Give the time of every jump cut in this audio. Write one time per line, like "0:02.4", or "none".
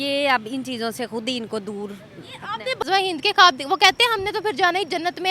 0:02.8